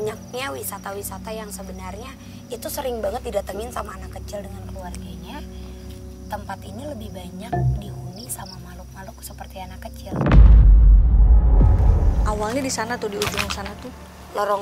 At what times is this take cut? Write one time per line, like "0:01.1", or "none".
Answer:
0:12.1

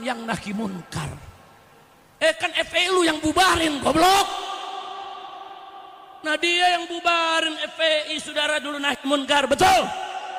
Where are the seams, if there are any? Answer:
none

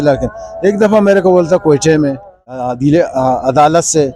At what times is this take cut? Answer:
0:02.6

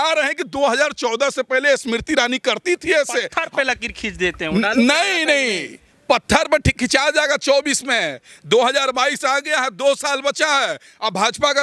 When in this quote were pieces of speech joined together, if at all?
0:03.4

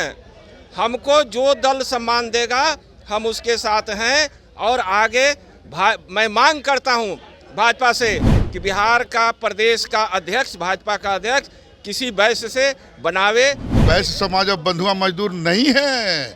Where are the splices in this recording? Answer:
0:13.7

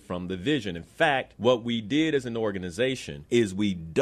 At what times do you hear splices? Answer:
0:01.3
0:03.1

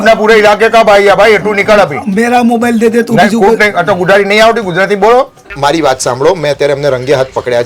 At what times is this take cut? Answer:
0:05.4

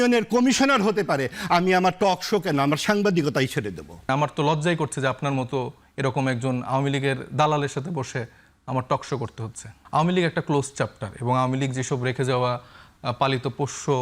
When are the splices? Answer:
0:04.1
0:09.7

